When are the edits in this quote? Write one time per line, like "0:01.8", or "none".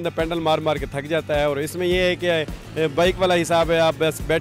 none